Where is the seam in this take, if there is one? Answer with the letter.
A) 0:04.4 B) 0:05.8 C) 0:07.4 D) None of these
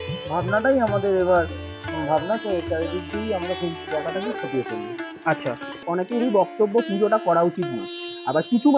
B